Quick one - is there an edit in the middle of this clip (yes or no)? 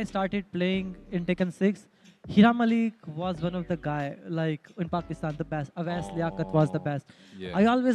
no